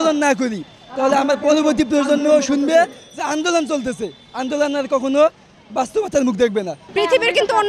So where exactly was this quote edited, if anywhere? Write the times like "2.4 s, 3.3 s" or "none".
6.8 s

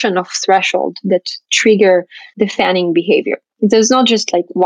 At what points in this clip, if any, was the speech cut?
2.2 s, 3.4 s

